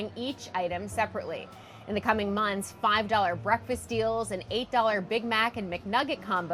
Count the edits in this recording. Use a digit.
0